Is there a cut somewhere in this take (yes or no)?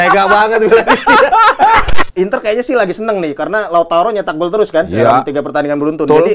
yes